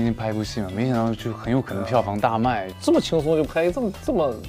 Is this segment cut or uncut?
cut